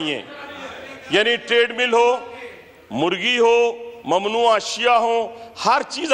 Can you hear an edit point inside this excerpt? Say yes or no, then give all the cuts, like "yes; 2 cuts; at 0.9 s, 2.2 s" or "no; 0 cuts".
no; 0 cuts